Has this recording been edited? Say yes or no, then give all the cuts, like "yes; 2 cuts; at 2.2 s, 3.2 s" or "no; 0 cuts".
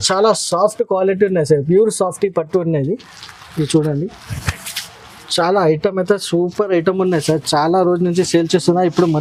no; 0 cuts